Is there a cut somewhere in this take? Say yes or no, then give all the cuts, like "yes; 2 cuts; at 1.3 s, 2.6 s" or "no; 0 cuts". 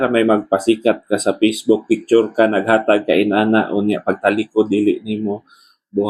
no; 0 cuts